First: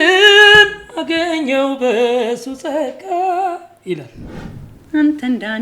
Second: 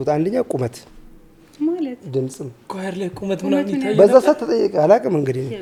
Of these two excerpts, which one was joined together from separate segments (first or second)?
first